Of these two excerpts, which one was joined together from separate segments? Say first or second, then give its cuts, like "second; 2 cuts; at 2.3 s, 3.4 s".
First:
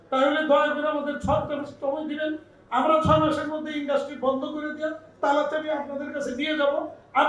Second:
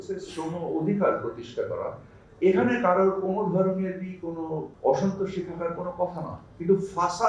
second; 1 cut; at 4.7 s